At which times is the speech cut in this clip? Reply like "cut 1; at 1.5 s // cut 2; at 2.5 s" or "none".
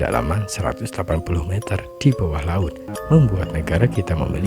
cut 1; at 2.9 s